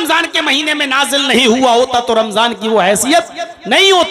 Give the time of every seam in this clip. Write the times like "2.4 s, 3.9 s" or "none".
none